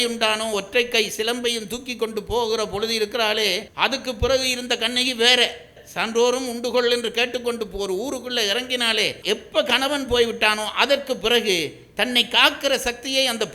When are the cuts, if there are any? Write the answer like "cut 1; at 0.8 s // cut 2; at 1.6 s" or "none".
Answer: cut 1; at 3.7 s // cut 2; at 5.8 s // cut 3; at 9.2 s